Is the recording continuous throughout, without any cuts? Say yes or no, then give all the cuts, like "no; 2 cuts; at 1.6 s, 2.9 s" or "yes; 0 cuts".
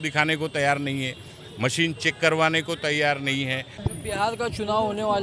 no; 1 cut; at 4.3 s